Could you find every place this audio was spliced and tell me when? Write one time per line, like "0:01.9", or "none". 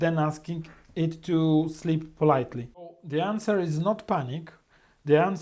0:03.0